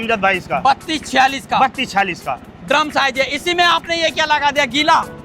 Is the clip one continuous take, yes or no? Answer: yes